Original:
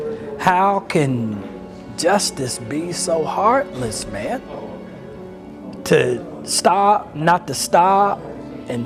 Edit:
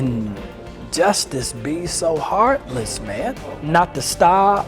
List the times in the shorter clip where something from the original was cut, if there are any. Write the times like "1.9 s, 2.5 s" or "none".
3.6 s